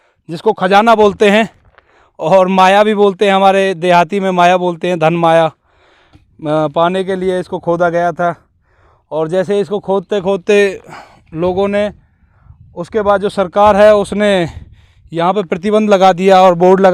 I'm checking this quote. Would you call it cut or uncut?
uncut